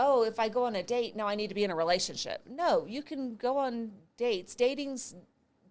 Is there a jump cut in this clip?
no; 0 cuts

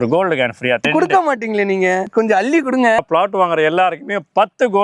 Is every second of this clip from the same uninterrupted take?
no; 3 cuts; at 0.9 s, 2.1 s, 3.0 s

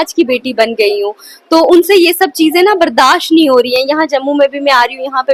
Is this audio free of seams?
yes; 0 cuts

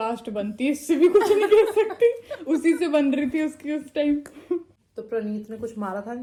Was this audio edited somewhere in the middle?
no; 0 cuts

